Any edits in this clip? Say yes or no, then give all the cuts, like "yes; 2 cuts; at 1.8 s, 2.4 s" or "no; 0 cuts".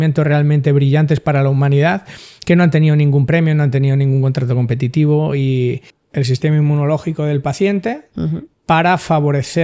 yes; 1 cut; at 5.9 s